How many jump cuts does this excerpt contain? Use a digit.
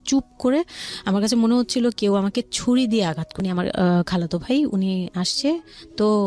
1